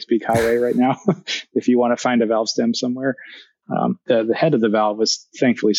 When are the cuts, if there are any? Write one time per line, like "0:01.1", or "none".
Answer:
none